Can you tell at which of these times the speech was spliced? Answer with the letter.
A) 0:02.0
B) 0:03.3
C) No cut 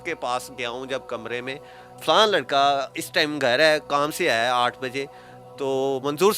A